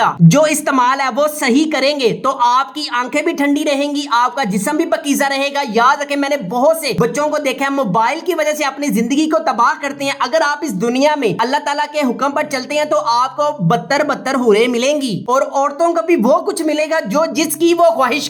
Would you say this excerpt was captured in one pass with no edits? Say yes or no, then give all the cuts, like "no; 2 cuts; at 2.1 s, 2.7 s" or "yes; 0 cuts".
yes; 0 cuts